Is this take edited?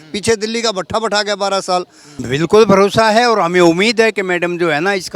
yes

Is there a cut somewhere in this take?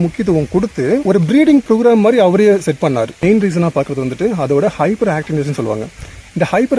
yes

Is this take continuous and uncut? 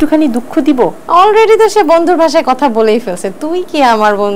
no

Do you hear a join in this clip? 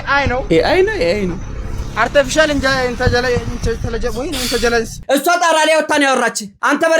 yes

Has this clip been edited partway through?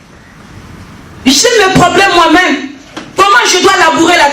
no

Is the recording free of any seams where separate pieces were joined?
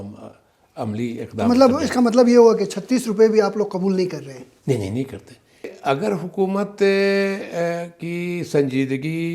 no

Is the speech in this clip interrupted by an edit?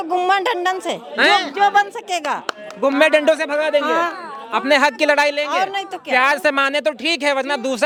no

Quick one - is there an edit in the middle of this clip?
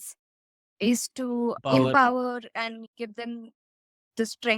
yes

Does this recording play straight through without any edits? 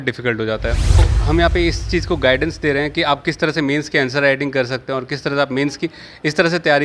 no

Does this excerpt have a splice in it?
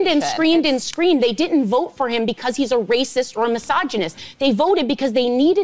no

